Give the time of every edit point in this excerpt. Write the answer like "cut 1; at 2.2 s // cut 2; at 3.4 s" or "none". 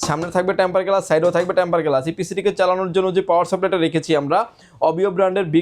none